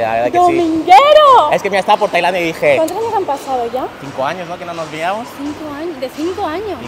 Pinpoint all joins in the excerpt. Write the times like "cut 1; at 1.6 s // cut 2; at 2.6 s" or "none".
none